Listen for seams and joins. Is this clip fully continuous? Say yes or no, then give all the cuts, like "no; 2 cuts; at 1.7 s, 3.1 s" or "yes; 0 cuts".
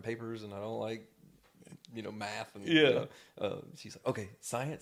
yes; 0 cuts